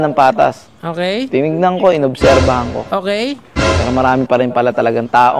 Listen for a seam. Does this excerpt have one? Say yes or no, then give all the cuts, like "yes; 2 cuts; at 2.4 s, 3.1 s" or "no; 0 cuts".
yes; 1 cut; at 1.9 s